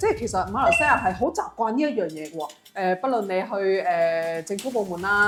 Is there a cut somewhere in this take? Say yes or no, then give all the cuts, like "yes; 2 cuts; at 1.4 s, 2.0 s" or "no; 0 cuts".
no; 0 cuts